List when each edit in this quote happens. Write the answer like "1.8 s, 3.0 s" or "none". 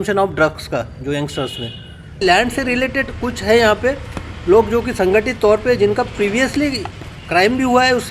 2.1 s